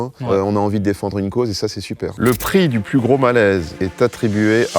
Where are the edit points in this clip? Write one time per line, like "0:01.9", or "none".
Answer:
0:02.1
0:03.8